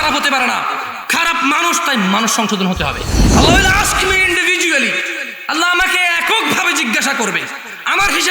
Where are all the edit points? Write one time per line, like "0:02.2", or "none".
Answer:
0:03.1

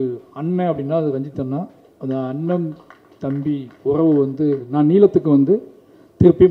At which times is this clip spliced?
0:04.7

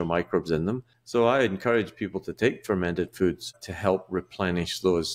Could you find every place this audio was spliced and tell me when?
0:00.9
0:03.6

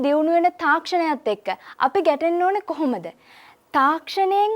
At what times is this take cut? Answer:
none

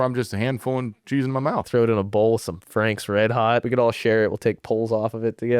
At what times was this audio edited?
0:01.7
0:03.6

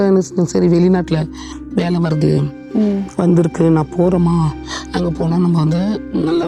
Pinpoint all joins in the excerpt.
none

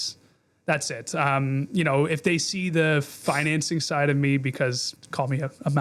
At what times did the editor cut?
0:04.9

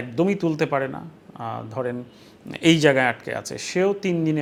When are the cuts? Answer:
none

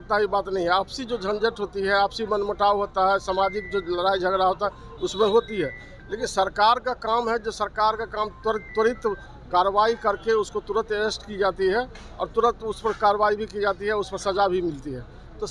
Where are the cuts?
none

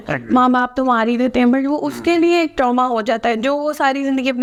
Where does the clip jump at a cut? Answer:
none

